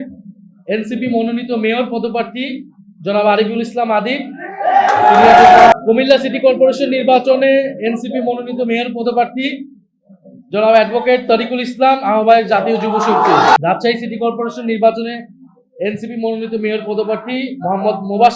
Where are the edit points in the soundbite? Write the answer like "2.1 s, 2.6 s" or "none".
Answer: 5.7 s, 13.6 s